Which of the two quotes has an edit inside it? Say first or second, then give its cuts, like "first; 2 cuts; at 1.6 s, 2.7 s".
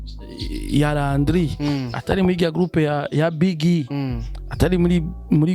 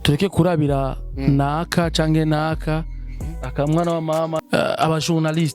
second; 1 cut; at 4.4 s